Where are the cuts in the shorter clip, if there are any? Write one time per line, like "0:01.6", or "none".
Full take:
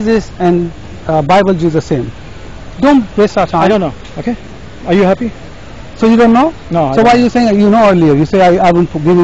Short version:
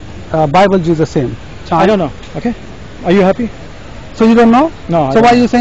0:01.7